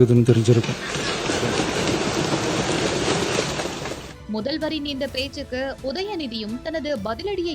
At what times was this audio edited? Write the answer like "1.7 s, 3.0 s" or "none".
none